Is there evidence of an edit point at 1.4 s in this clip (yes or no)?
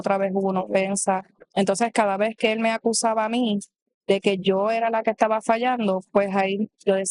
yes